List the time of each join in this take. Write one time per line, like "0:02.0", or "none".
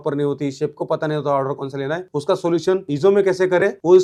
none